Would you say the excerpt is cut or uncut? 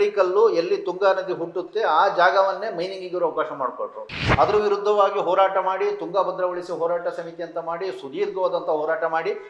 uncut